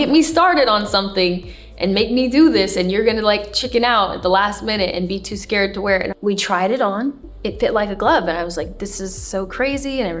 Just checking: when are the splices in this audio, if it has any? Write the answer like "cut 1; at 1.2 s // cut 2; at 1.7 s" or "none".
cut 1; at 6.2 s